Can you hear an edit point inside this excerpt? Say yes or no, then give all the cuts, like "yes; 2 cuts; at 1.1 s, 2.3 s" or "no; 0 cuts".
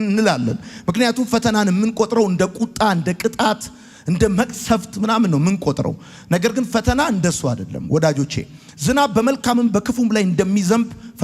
no; 0 cuts